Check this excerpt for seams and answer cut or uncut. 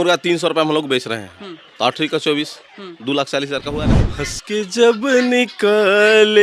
cut